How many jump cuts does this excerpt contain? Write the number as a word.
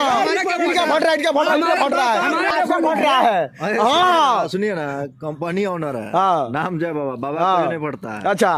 zero